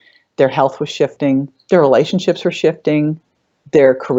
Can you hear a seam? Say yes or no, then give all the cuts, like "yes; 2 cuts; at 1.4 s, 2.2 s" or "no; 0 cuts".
no; 0 cuts